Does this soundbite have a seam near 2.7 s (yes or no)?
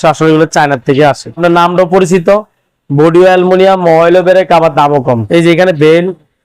no